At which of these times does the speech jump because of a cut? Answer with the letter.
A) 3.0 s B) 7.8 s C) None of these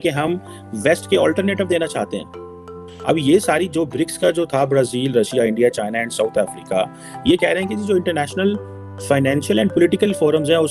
C